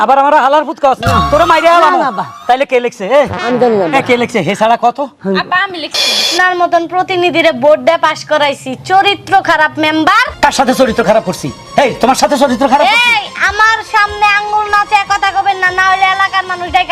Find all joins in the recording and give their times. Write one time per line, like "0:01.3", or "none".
0:06.2